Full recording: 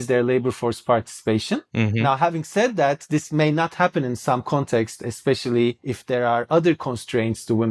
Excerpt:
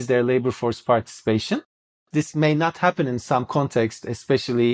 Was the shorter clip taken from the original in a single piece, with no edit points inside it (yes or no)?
no